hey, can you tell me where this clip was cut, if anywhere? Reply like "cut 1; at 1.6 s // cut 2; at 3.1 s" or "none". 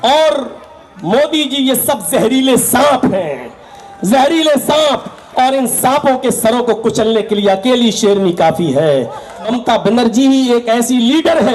cut 1; at 9.4 s